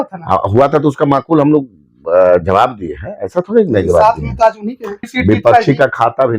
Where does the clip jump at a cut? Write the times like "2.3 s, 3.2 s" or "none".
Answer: 5.1 s